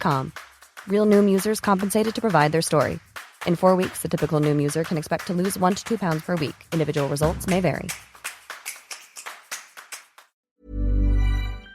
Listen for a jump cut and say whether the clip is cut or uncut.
cut